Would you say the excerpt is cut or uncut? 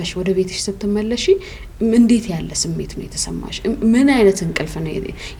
uncut